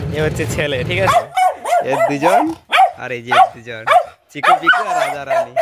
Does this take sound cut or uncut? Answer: cut